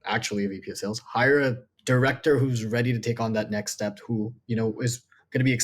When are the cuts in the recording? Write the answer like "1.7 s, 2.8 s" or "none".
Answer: 1.7 s